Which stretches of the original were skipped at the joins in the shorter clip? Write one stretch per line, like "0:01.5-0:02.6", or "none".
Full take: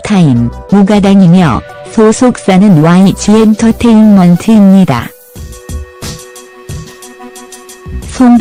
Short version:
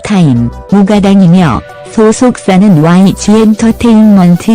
none

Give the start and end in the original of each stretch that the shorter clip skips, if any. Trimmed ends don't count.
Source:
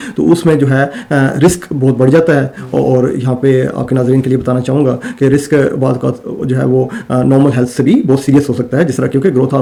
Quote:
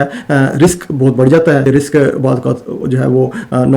0:02.5-0:05.2

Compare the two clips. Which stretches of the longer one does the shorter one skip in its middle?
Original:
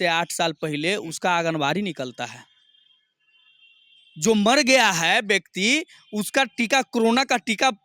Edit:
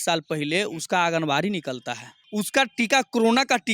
0:02.5-0:06.0

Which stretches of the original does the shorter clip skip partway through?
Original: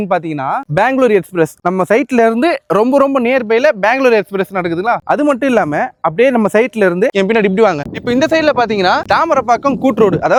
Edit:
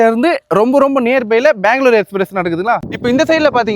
0:05.0-0:07.8

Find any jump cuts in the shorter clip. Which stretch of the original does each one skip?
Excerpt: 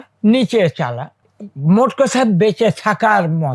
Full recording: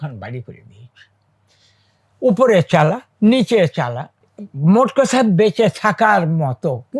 none

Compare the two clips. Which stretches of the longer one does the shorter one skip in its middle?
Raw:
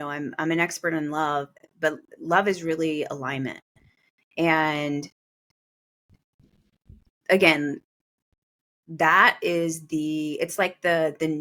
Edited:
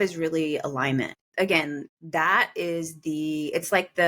0:03.7-0:07.1
0:07.9-0:08.8

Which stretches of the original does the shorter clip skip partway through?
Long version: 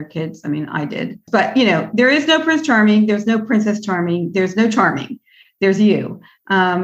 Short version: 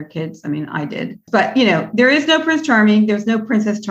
none

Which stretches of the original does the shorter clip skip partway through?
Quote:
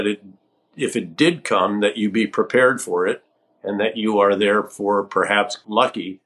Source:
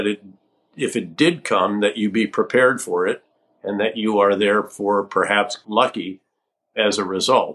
none

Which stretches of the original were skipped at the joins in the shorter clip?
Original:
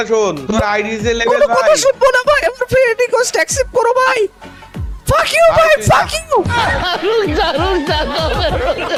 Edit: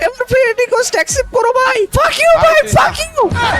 0:04.3-0:05.0

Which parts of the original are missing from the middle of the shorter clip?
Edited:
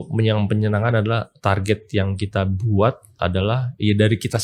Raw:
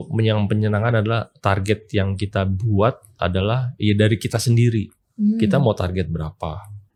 none

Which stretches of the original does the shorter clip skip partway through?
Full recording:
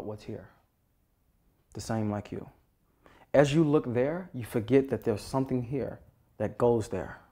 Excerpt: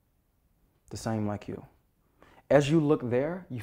none

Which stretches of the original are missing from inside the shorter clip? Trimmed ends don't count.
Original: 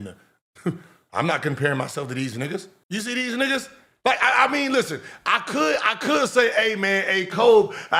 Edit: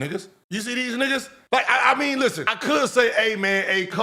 0:03.7-0:03.9
0:05.1-0:05.9

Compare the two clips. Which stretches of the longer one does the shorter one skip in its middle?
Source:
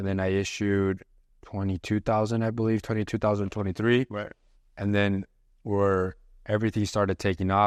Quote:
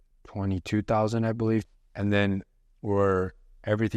0:02.9-0:04.5

